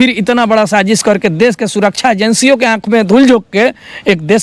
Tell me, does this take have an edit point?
no; 0 cuts

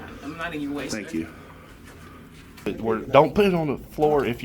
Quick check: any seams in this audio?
yes; 1 cut; at 2.7 s

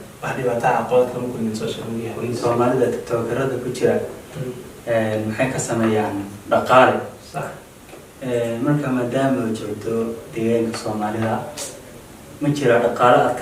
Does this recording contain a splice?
yes; 1 cut; at 2.4 s

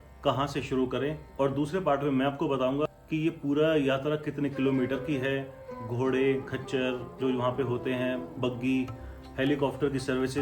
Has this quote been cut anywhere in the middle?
yes; 2 cuts; at 1.2 s, 2.9 s

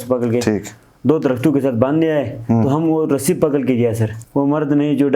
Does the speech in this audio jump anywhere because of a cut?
yes; 1 cut; at 4.1 s

